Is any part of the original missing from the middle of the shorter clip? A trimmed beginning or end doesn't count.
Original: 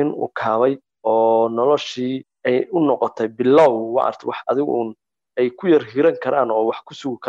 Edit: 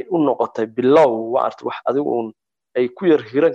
no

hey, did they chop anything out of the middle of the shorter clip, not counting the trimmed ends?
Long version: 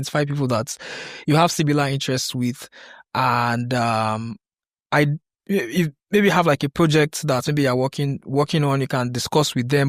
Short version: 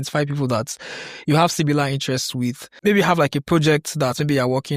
yes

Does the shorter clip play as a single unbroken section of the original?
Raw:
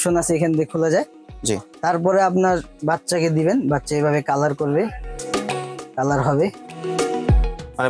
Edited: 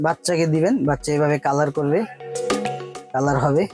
yes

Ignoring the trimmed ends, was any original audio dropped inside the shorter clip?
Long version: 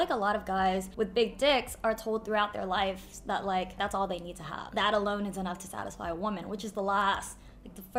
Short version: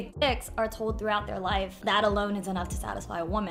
yes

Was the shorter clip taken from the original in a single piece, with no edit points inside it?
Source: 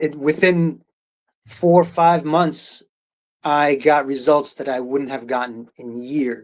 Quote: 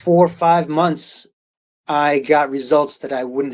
yes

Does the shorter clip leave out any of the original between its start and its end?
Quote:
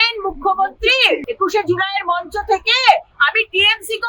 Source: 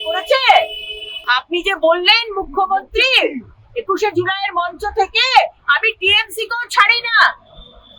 yes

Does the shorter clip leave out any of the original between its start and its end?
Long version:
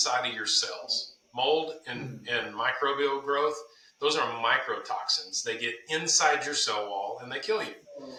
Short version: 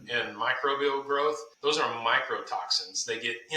yes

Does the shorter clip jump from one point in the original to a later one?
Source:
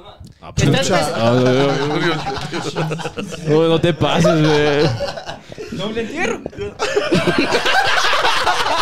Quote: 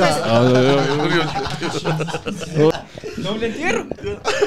yes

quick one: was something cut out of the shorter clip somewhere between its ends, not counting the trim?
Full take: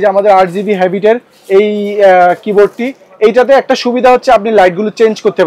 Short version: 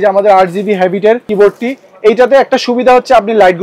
yes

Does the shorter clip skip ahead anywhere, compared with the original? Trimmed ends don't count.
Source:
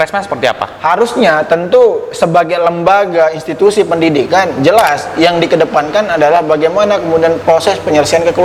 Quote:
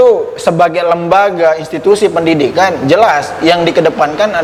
no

